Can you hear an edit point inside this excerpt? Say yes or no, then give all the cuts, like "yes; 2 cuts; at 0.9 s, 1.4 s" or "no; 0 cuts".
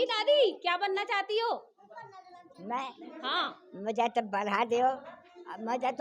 no; 0 cuts